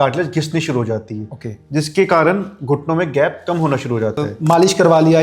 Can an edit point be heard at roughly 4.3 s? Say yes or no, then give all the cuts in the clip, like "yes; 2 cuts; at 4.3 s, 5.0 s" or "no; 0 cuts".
yes; 1 cut; at 4.3 s